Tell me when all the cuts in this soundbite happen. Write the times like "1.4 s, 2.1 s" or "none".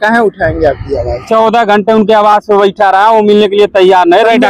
1.2 s

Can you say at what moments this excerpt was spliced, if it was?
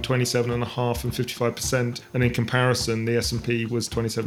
2.0 s

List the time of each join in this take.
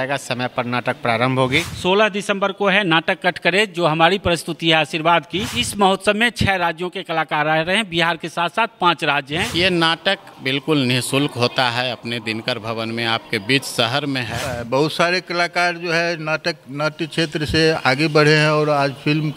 1.7 s, 5.6 s, 9.5 s, 14.5 s

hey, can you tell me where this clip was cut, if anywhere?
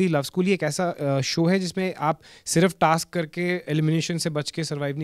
none

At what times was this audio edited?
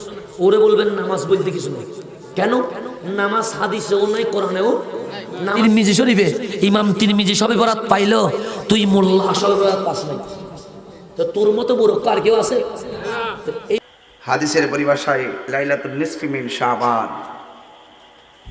5.6 s, 13.8 s

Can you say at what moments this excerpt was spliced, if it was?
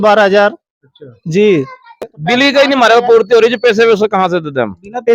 2.1 s

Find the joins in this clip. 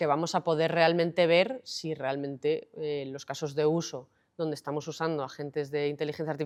none

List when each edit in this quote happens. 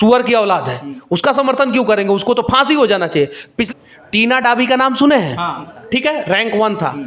3.5 s, 5.7 s

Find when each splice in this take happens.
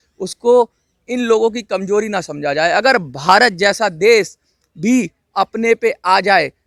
none

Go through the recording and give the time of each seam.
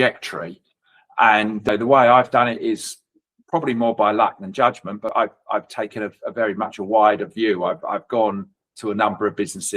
1.7 s, 5.1 s

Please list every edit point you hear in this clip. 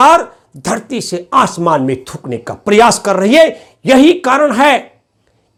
none

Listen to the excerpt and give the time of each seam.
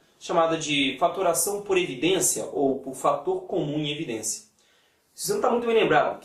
3.9 s

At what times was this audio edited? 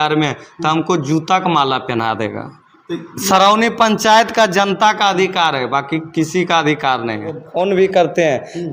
7.4 s

